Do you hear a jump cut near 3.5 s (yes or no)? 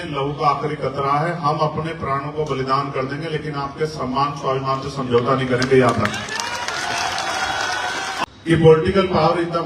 no